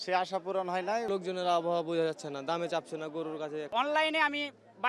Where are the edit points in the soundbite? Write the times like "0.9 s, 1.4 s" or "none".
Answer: 1.1 s, 3.7 s